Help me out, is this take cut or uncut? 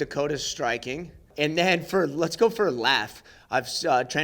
cut